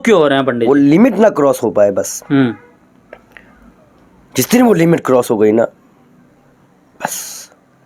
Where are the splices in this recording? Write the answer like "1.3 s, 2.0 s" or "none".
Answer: none